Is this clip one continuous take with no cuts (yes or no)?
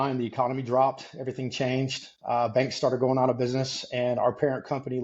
yes